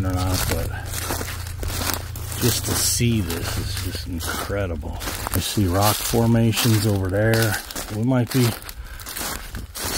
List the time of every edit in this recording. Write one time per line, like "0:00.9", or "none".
0:05.4
0:07.8

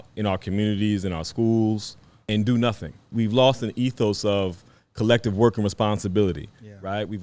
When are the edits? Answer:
0:02.3
0:03.1

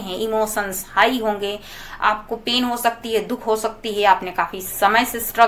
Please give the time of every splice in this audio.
none

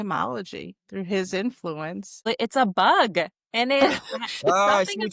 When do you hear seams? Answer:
0:02.3

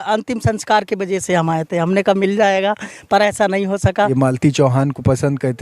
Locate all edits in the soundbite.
0:04.1

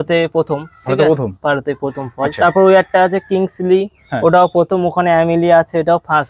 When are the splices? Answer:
none

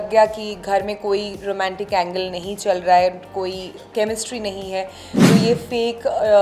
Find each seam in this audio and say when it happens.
none

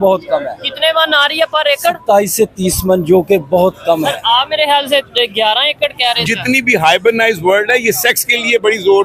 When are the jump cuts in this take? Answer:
0:06.2

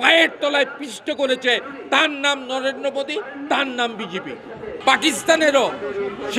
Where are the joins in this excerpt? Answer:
0:04.7

